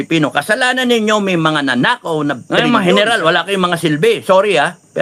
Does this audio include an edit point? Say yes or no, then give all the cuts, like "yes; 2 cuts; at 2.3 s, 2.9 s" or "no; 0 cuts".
yes; 1 cut; at 2.6 s